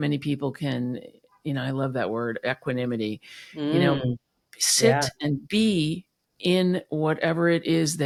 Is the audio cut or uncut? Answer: uncut